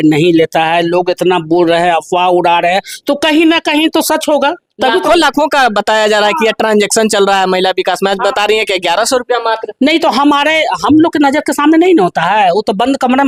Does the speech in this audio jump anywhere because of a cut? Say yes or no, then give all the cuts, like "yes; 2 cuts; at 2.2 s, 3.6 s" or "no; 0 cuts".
no; 0 cuts